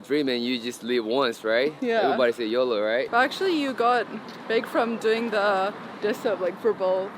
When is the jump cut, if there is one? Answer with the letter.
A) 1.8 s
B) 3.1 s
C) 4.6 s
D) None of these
B